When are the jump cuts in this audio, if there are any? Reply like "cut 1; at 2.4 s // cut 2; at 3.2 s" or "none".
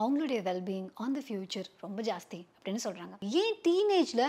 cut 1; at 3.1 s

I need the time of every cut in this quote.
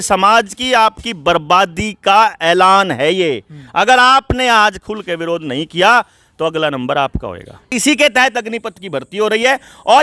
cut 1; at 7.8 s

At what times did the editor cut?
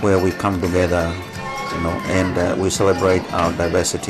cut 1; at 1.4 s

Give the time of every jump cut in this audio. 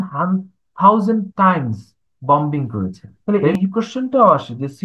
cut 1; at 3.1 s

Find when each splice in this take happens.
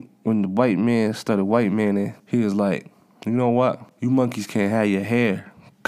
cut 1; at 2.2 s // cut 2; at 3.9 s

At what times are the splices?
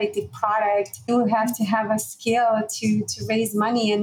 cut 1; at 1.1 s

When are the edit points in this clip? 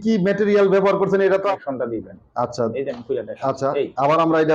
cut 1; at 1.5 s

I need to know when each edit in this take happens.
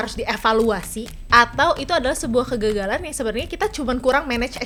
none

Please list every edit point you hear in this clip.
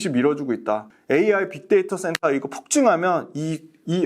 cut 1; at 0.9 s

